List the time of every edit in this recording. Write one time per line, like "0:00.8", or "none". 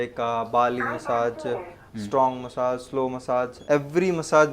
0:03.6

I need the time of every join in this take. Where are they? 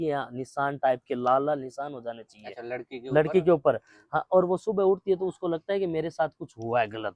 none

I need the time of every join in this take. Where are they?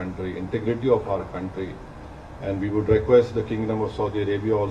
none

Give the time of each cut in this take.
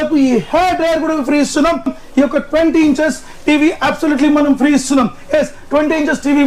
0:02.0

